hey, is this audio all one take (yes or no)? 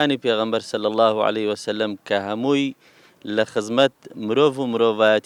yes